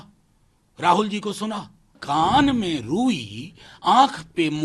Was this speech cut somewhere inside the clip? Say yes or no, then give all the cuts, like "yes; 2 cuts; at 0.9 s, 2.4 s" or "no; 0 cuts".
yes; 1 cut; at 2.0 s